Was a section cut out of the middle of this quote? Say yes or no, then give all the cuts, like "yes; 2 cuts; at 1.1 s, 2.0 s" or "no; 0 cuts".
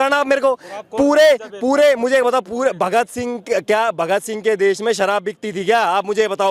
no; 0 cuts